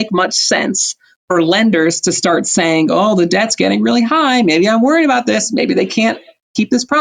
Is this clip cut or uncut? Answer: uncut